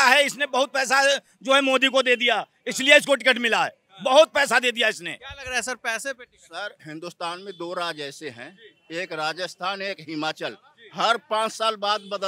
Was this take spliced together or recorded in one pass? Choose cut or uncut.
uncut